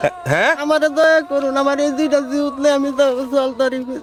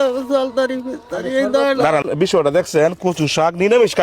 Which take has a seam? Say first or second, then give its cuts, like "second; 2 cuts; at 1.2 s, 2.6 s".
second; 1 cut; at 2.0 s